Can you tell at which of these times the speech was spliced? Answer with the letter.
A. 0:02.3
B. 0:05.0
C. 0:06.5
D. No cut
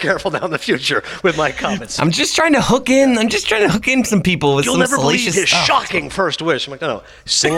D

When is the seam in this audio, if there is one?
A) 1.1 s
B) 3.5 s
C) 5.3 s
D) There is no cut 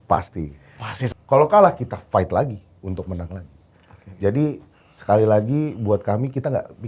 A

